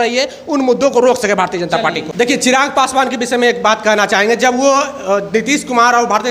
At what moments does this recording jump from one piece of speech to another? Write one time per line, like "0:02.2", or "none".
0:02.1